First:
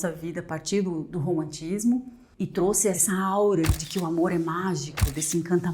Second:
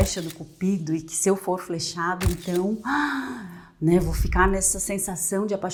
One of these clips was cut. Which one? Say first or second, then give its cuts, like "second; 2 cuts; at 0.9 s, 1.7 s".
first; 2 cuts; at 3.0 s, 3.8 s